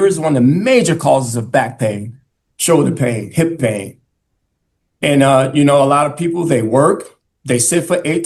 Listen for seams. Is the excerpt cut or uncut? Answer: uncut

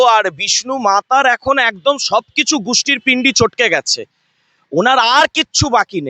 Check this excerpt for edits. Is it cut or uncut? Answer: uncut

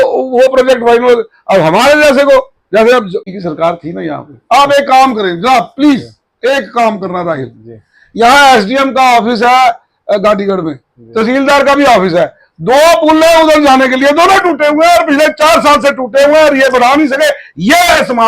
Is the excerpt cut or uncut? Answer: cut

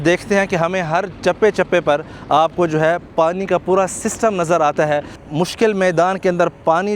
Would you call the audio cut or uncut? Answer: cut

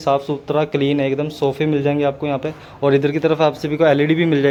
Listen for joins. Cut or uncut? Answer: uncut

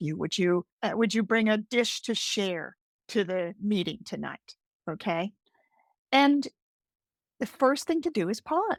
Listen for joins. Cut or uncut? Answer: uncut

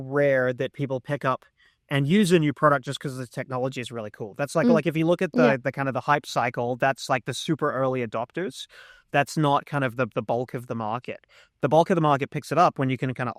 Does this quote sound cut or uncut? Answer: uncut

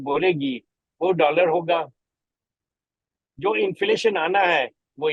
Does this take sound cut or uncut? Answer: uncut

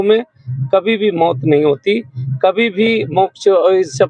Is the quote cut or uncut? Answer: uncut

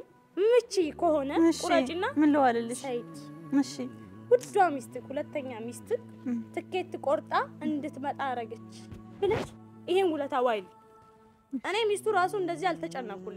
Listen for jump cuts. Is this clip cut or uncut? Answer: cut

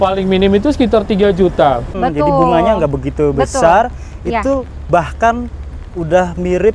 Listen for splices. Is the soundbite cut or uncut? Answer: cut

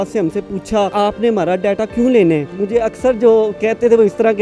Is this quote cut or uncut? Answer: uncut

